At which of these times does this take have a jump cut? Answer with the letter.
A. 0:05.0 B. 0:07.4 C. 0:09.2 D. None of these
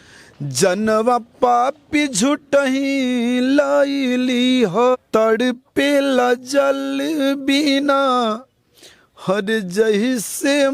A